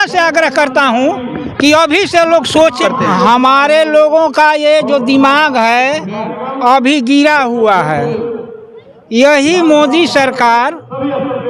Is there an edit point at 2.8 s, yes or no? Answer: yes